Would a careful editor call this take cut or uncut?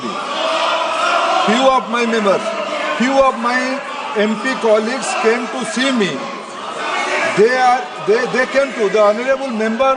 uncut